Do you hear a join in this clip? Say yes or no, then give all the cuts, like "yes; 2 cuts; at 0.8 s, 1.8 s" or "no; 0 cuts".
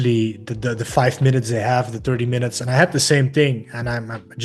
no; 0 cuts